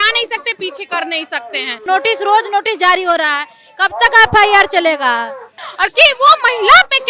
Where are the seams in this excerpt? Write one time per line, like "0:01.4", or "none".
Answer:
0:01.8
0:05.6